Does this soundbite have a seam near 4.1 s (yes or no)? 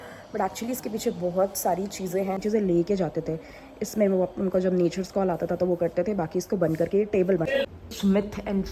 no